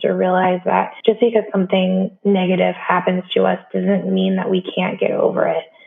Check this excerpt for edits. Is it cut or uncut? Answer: cut